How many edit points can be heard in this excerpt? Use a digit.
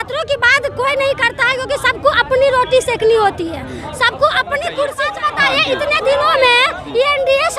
1